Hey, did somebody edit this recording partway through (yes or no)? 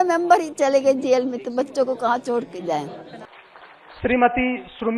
yes